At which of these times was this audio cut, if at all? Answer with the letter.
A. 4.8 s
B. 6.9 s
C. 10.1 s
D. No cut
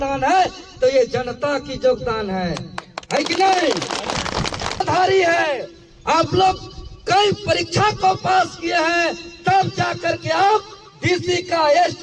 A